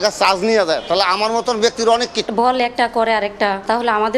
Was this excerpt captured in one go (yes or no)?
no